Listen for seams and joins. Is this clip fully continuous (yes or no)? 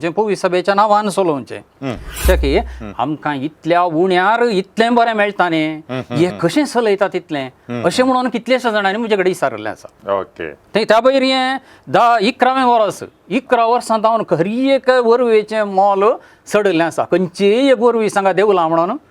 no